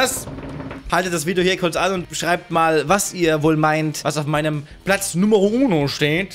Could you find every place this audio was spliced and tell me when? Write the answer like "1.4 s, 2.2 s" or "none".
none